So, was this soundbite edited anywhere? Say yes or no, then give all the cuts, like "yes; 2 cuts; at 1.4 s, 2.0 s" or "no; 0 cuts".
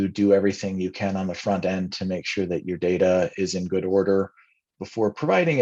no; 0 cuts